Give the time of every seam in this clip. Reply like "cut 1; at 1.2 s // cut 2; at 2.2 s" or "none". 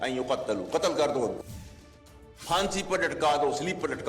cut 1; at 1.8 s